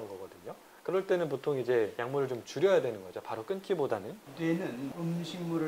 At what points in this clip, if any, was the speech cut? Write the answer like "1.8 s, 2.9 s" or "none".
4.2 s